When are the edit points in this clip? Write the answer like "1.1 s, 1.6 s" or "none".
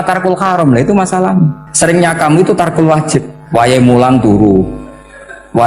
1.6 s, 3.4 s